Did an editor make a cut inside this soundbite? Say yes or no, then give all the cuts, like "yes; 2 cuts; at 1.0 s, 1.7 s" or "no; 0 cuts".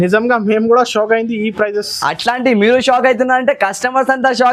no; 0 cuts